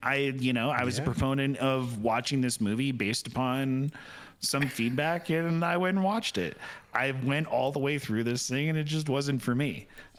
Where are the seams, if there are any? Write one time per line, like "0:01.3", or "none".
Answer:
none